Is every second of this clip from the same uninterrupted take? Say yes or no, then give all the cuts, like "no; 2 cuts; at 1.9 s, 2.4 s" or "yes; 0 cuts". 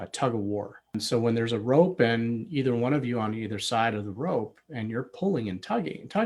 no; 1 cut; at 0.9 s